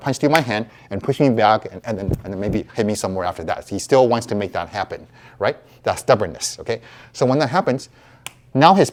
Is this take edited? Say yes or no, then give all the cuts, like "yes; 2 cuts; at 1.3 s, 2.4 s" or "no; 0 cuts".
no; 0 cuts